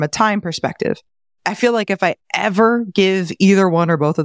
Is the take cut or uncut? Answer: uncut